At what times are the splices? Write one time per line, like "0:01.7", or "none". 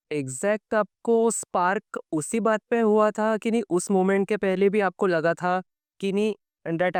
none